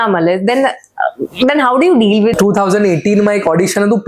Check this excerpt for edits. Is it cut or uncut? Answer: cut